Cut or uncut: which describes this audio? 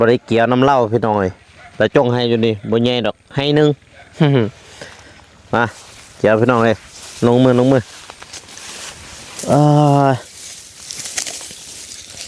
uncut